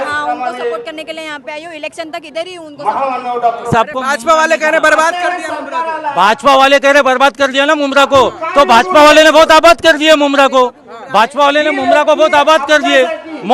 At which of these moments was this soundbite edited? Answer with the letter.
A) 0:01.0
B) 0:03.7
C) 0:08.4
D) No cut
B